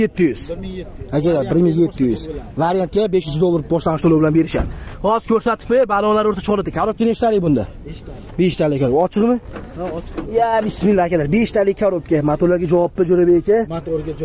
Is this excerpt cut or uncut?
uncut